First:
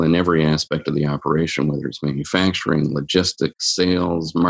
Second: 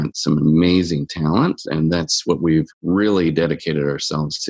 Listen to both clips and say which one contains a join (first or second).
second